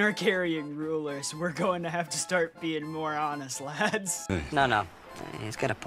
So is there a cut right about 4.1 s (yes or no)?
yes